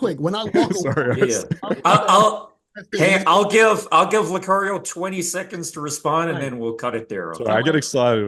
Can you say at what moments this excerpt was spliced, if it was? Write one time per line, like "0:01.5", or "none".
none